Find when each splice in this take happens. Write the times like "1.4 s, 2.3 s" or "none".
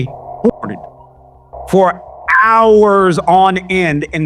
none